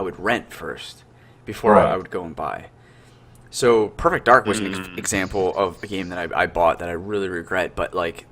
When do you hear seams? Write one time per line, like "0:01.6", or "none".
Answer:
none